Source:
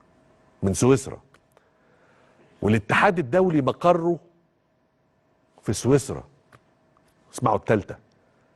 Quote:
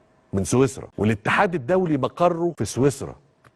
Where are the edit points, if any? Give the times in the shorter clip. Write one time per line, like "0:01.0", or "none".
0:00.8
0:02.5